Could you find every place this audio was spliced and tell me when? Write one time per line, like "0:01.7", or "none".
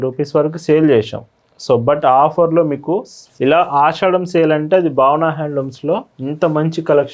0:03.2

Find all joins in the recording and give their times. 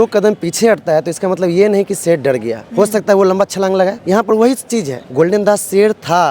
0:04.0
0:05.0

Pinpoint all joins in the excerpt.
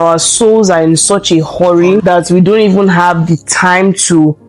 0:02.0

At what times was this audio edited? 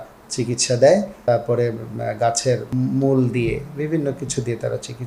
0:01.2
0:02.7

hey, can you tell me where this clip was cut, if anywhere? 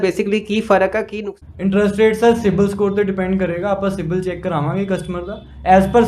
0:01.1

